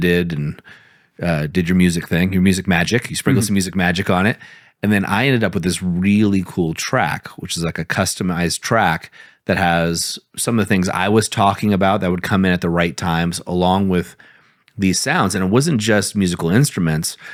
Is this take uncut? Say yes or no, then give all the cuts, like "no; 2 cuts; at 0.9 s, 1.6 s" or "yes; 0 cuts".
yes; 0 cuts